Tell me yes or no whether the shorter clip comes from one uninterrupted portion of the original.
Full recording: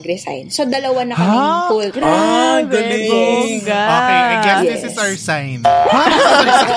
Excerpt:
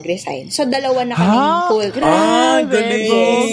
yes